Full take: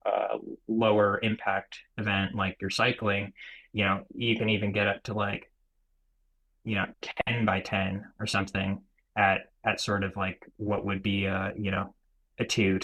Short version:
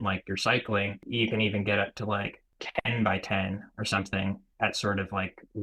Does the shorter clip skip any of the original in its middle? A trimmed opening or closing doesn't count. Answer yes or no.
yes